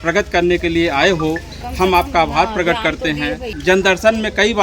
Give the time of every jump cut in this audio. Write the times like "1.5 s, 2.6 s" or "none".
3.5 s